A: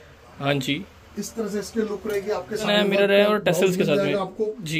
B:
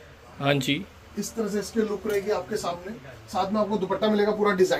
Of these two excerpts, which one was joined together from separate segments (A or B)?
A